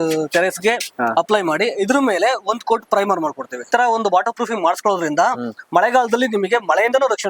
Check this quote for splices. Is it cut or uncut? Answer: cut